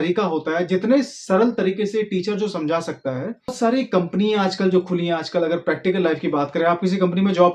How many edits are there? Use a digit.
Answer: 1